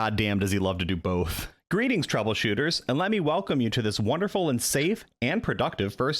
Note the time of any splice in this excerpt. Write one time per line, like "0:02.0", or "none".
0:01.5